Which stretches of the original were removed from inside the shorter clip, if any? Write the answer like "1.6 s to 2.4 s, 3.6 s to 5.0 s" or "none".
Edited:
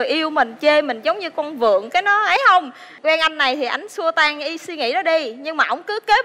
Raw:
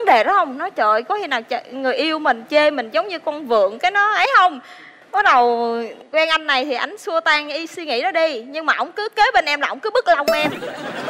4.7 s to 5.9 s